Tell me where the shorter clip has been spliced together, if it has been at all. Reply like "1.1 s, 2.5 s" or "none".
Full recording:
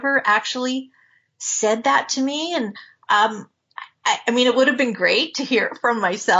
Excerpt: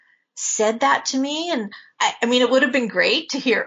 1.8 s